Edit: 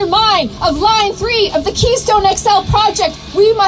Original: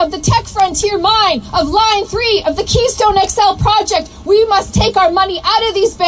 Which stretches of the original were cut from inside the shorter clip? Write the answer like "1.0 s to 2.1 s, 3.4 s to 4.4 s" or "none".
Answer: none